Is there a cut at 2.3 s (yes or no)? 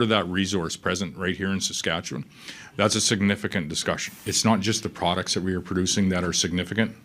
no